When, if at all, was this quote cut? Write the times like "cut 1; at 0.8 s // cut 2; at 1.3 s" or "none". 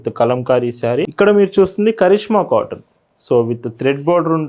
cut 1; at 1.1 s